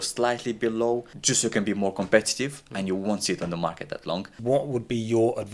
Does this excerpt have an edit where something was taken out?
yes; 2 cuts; at 1.1 s, 4.3 s

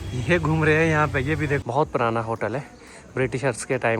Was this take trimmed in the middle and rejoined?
yes; 1 cut; at 1.6 s

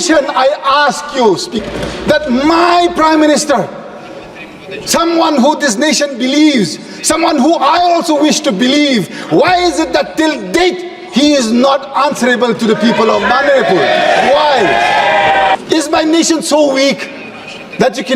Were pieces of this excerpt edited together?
yes; 2 cuts; at 1.5 s, 15.5 s

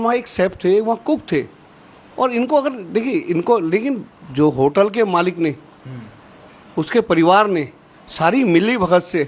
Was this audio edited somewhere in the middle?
no; 0 cuts

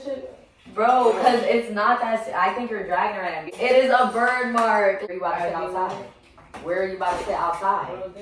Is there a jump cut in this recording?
yes; 2 cuts; at 3.5 s, 5.1 s

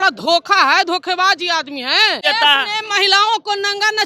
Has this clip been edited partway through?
yes; 1 cut; at 2.2 s

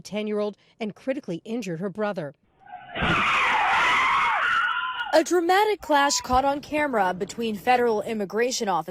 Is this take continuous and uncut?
no; 1 cut; at 2.7 s

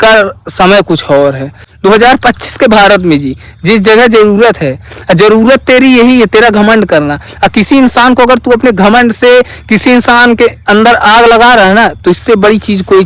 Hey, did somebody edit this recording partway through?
yes; 1 cut; at 1.5 s

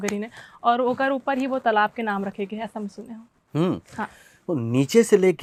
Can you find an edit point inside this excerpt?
no; 0 cuts

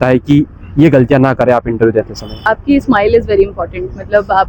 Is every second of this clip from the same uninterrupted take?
no; 1 cut; at 2.4 s

